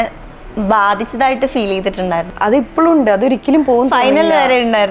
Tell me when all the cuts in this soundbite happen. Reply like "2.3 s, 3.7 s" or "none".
2.3 s

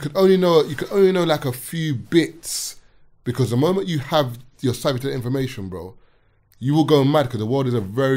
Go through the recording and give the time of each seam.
none

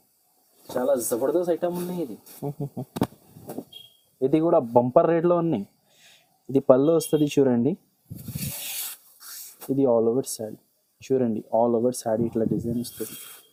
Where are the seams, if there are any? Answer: none

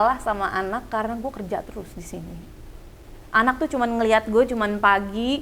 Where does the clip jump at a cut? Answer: none

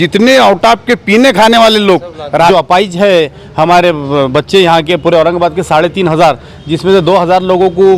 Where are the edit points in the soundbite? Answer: 2.5 s

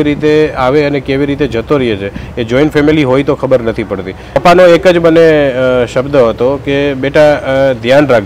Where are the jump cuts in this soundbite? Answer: 4.4 s

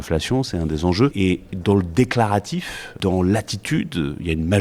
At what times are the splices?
1.1 s, 2.9 s

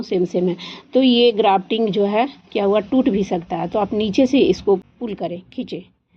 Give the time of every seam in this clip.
4.8 s

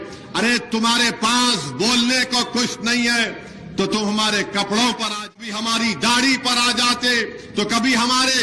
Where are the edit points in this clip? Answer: 5.4 s

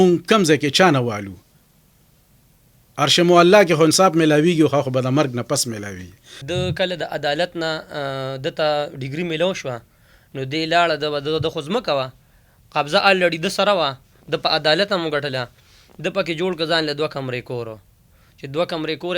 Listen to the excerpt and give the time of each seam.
6.3 s

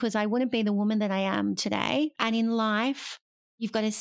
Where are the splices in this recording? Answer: 2.2 s

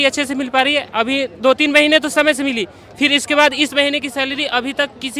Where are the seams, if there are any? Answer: none

